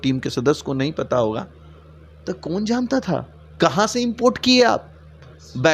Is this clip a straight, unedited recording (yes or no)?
no